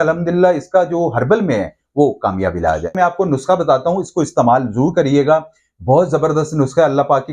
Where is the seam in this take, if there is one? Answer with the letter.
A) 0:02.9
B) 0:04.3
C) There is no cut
A